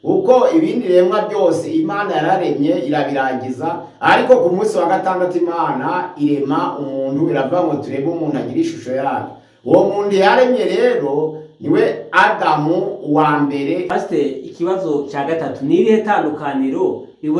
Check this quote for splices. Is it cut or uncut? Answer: cut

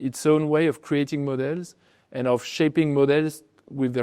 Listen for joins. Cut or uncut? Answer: uncut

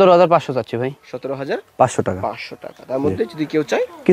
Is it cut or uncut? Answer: uncut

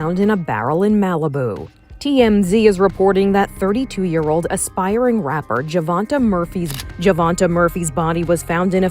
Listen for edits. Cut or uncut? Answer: cut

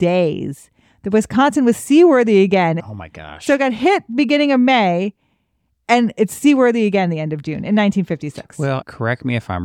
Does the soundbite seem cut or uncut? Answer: cut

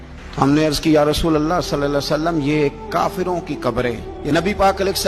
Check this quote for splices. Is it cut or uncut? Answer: cut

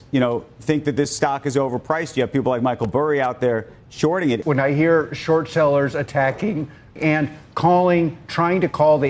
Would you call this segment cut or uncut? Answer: cut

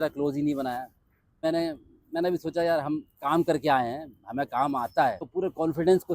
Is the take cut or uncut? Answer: cut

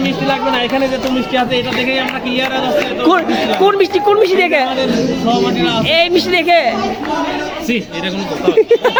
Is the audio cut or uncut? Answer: uncut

